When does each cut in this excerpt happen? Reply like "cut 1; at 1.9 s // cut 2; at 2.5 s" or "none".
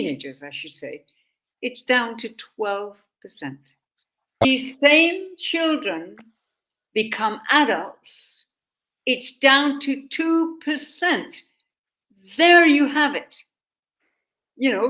cut 1; at 4.4 s